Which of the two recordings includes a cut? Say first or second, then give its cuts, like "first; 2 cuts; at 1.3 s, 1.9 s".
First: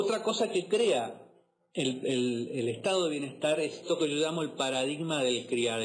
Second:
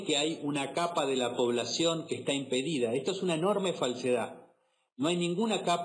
second; 1 cut; at 2.3 s